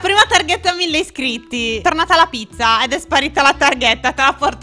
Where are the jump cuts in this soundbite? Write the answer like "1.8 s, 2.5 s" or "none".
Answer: 1.8 s